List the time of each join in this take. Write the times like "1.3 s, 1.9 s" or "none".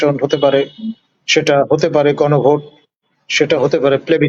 none